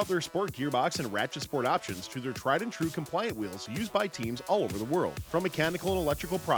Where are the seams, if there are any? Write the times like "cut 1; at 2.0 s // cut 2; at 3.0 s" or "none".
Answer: none